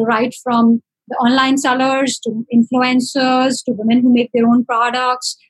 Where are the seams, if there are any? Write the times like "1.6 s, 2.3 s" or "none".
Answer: none